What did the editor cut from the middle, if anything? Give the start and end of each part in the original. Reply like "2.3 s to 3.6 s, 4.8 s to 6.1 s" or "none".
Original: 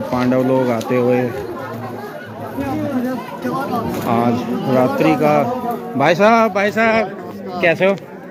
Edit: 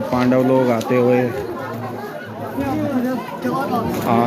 none